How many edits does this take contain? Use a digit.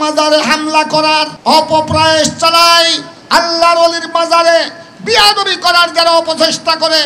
1